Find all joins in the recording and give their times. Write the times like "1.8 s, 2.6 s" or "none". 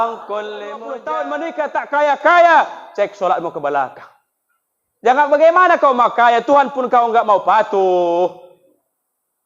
0.9 s